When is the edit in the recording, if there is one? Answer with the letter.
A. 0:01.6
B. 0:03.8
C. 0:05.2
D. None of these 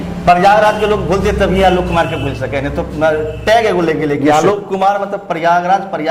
D